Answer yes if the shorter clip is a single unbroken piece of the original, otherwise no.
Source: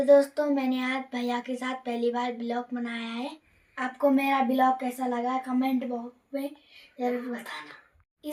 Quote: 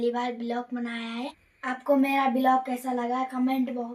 no